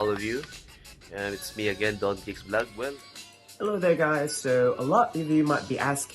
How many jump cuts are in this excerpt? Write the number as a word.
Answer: one